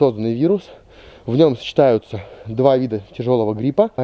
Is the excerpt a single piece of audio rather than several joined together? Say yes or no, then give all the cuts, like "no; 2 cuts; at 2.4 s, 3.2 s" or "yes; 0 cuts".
yes; 0 cuts